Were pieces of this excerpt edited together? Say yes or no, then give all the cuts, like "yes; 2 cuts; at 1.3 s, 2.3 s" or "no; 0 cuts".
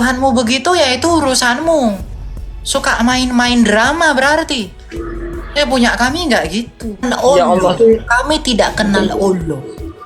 yes; 1 cut; at 7.0 s